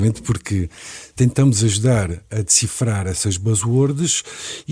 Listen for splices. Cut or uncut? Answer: uncut